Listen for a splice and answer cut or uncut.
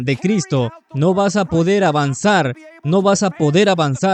uncut